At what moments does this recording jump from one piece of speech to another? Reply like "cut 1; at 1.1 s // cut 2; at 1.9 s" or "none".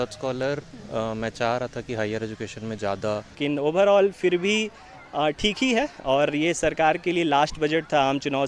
cut 1; at 3.4 s